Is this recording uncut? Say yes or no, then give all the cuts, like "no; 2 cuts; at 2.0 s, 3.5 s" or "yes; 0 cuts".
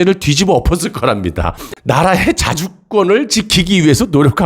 no; 1 cut; at 1.7 s